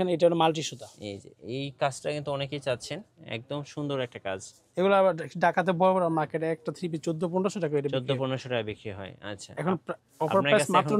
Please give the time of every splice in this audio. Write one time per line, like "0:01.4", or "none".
none